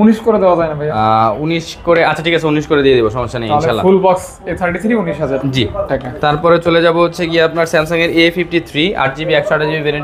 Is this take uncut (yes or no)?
yes